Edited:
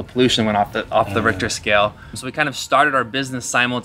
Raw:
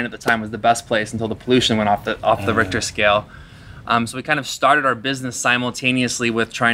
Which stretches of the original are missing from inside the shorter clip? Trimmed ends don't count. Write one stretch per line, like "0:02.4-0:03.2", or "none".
0:03.6-0:04.2